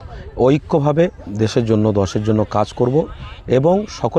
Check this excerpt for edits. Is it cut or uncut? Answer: cut